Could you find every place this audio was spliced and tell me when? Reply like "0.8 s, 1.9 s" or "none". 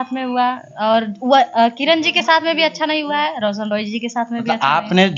none